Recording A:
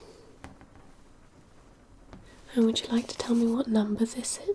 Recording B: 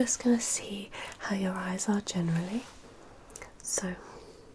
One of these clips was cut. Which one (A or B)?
A